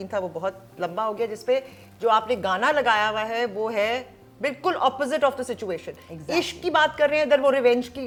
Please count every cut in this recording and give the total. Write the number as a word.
zero